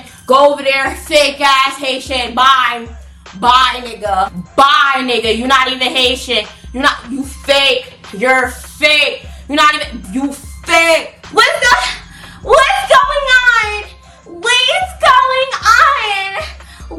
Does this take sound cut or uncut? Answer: uncut